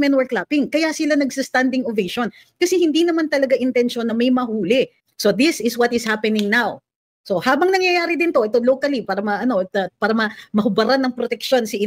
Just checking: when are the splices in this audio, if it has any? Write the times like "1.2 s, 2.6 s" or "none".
5.0 s